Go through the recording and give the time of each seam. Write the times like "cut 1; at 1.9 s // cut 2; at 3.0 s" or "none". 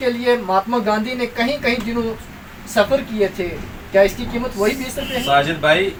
none